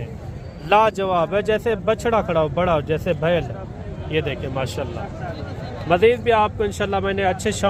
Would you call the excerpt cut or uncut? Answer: uncut